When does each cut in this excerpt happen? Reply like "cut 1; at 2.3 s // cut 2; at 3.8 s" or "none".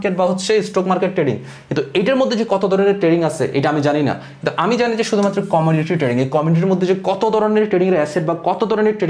none